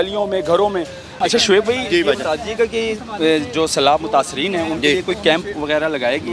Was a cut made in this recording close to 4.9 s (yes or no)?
no